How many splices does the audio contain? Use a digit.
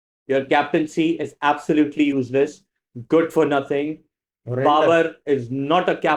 0